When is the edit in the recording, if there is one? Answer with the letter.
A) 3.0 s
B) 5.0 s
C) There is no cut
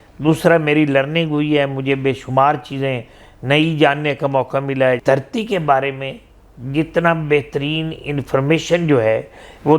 B